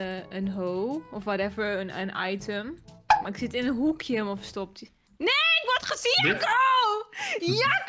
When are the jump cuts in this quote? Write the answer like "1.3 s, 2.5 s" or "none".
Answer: none